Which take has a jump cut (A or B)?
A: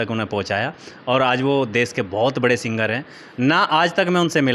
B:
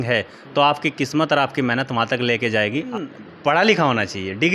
B